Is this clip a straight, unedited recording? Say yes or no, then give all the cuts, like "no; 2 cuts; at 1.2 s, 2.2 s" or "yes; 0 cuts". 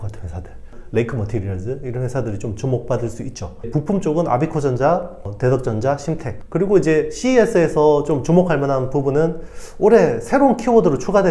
no; 2 cuts; at 3.7 s, 6.3 s